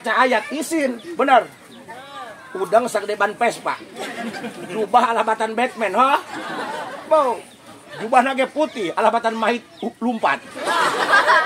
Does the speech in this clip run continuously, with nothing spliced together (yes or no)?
yes